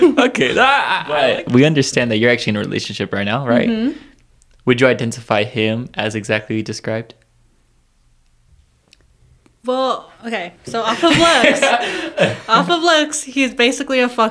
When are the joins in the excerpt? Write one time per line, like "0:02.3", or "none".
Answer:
0:01.0